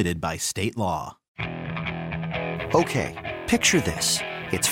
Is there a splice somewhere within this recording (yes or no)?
yes